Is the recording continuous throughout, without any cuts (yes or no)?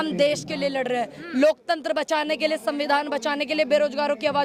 yes